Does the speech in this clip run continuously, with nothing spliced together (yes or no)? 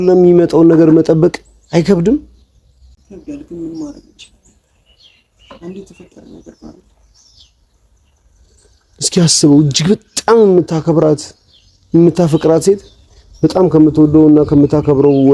yes